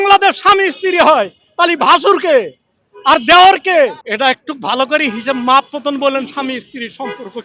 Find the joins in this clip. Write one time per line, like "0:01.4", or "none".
0:04.0